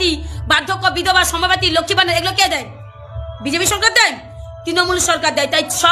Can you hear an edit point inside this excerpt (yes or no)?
no